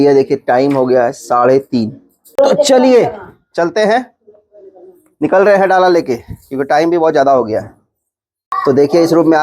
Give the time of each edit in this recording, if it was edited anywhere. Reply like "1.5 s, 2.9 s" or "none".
2.2 s, 8.5 s

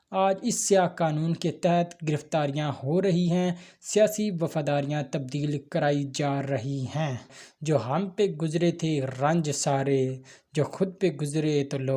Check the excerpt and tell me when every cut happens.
7.4 s

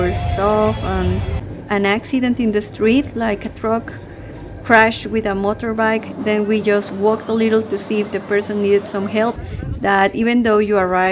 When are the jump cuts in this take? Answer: 1.5 s, 9.4 s

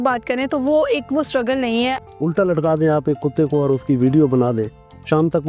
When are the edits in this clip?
2.0 s

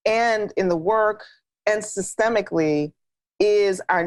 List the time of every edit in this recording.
none

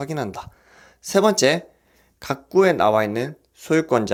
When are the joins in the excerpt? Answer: none

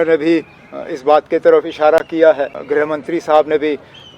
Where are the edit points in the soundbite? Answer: 2.6 s

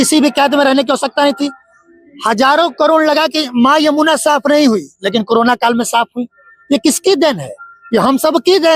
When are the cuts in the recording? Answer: none

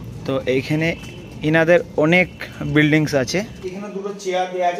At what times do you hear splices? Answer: 3.7 s

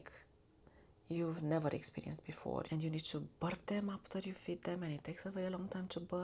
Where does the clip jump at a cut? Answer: 2.7 s

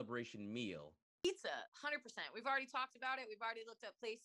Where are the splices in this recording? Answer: 1.2 s

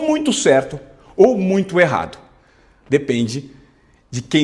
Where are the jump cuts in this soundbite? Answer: none

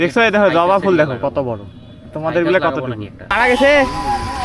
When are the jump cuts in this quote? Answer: 3.2 s

